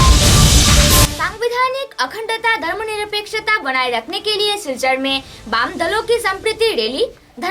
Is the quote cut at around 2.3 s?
no; 1 cut; at 1.1 s

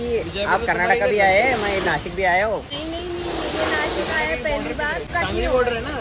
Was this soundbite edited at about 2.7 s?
yes; 2 cuts; at 2.7 s, 5.1 s

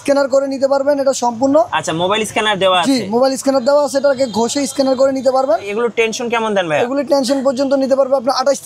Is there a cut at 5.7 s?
yes; 1 cut; at 5.7 s

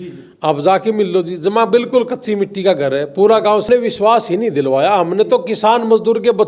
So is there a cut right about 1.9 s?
no; 1 cut; at 3.7 s

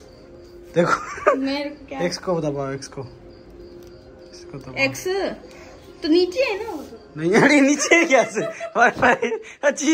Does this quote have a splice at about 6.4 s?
no; 0 cuts

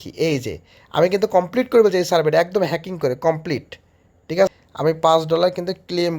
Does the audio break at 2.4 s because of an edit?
no; 1 cut; at 4.5 s

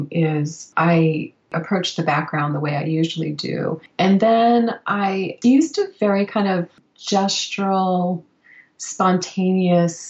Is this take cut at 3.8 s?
yes; 1 cut; at 3.8 s

